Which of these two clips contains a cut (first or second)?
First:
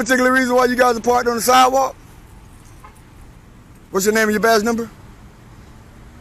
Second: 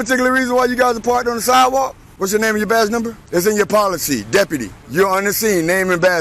second